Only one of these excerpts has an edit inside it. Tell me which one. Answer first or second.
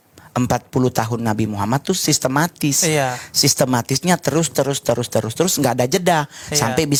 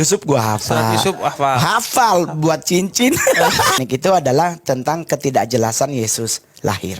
second